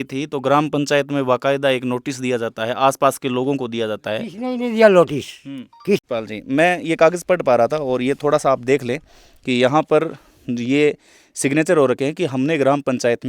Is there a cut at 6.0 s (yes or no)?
yes